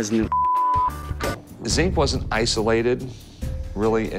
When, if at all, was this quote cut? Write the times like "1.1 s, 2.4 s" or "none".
1.2 s

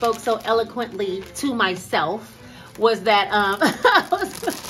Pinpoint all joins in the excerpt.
none

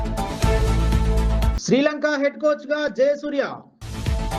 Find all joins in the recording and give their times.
none

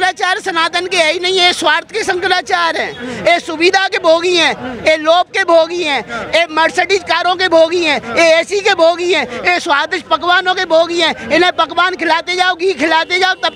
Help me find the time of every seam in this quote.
none

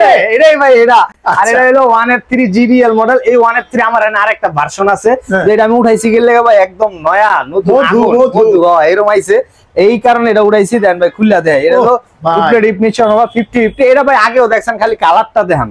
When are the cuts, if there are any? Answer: none

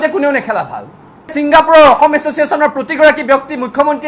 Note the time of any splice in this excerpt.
1.3 s

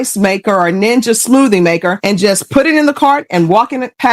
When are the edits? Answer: none

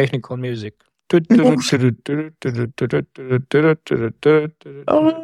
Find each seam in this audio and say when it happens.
none

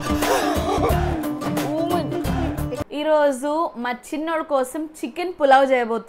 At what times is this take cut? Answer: 2.7 s

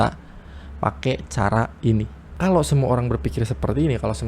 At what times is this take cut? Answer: 2.2 s

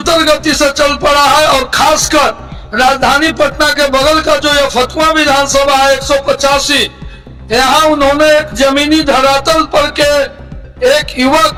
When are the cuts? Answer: none

